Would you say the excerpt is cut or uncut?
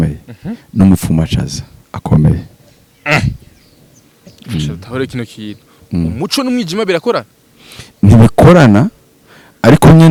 uncut